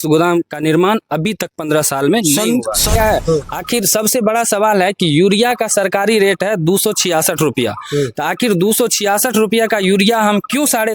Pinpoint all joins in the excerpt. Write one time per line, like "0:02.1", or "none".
0:02.9